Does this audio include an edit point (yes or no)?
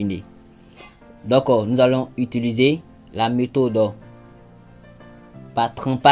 no